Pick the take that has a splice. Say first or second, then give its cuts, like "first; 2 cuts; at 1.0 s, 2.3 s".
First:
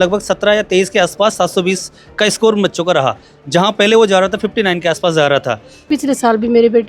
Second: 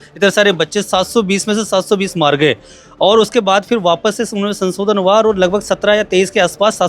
first; 1 cut; at 5.8 s